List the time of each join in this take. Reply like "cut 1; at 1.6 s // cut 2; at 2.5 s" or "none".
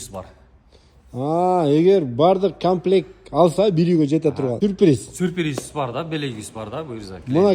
cut 1; at 4.6 s